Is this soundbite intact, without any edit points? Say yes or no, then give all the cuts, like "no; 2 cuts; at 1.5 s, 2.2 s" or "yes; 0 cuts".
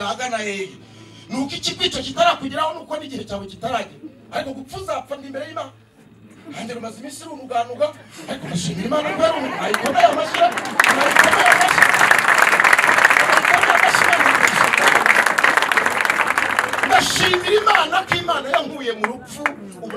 yes; 0 cuts